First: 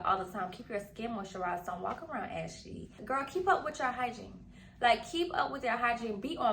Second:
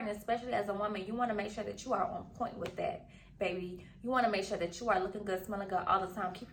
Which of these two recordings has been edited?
first; 1 cut; at 3.0 s

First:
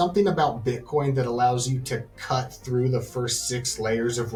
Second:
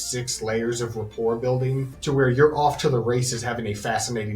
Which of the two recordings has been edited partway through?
second; 1 cut; at 1.9 s

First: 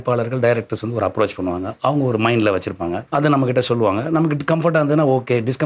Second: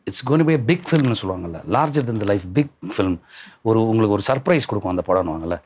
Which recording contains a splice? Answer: first; 1 cut; at 3.0 s

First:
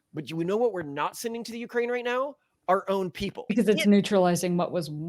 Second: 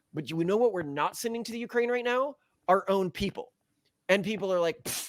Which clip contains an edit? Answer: first; 1 cut; at 3.5 s

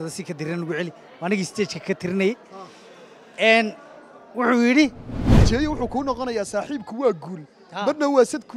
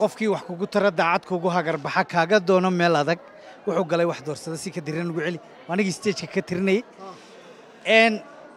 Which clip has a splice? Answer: first; 1 cut; at 5.3 s

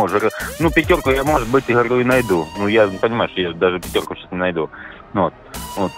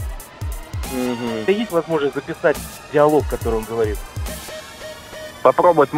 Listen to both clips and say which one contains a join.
second; 1 cut; at 1.5 s

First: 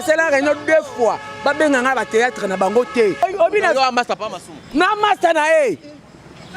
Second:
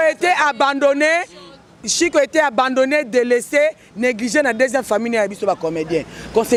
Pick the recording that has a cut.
first; 1 cut; at 3.2 s

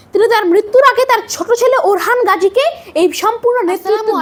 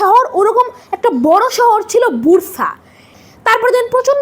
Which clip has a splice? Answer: second; 1 cut; at 3.1 s

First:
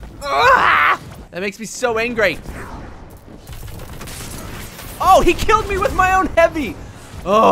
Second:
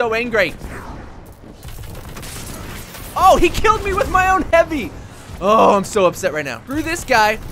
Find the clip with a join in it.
second; 1 cut; at 6.6 s

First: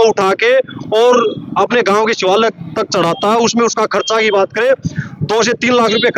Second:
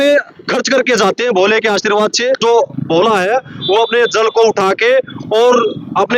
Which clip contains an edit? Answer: second; 1 cut; at 2.4 s

